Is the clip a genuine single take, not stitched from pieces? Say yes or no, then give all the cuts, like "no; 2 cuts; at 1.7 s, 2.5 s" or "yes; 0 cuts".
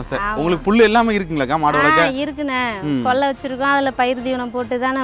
yes; 0 cuts